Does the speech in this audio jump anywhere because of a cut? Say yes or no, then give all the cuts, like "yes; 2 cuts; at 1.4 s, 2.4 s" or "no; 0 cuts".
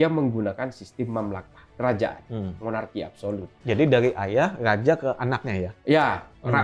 no; 0 cuts